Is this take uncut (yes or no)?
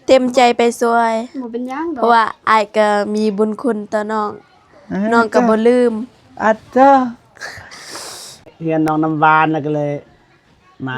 no